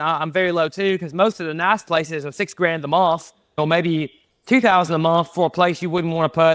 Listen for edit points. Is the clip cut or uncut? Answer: cut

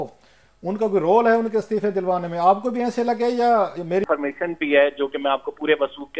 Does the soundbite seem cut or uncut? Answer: cut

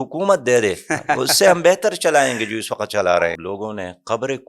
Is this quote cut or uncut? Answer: cut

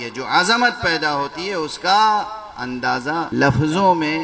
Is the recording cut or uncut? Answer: cut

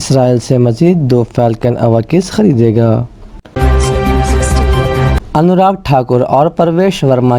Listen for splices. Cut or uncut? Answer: cut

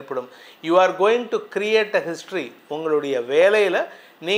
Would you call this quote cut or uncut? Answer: uncut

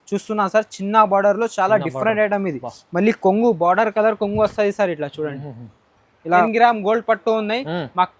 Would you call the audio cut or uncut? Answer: cut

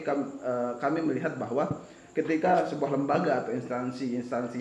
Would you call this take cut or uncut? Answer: uncut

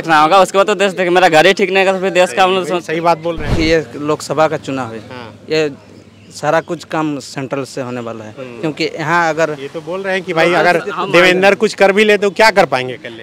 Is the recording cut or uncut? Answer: cut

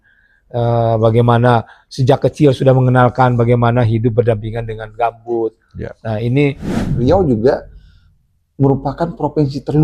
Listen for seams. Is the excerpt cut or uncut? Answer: cut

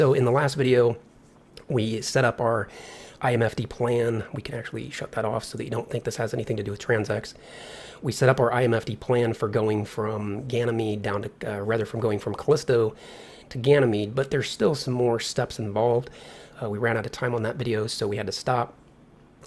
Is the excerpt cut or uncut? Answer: cut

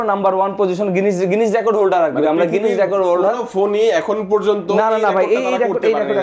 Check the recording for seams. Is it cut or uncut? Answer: uncut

